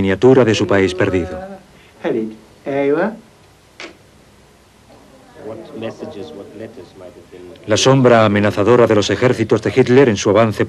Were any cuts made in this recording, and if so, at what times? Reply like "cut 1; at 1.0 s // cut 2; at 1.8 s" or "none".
cut 1; at 6.0 s